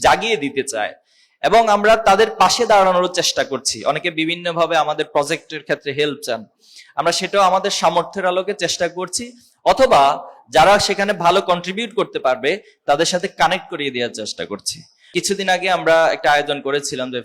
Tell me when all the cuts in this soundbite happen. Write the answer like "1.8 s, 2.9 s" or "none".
15.0 s